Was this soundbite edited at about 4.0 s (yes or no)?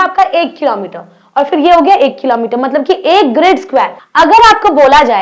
yes